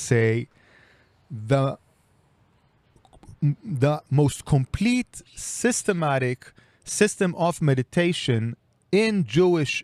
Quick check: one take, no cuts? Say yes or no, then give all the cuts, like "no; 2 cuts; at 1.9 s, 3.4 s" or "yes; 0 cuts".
yes; 0 cuts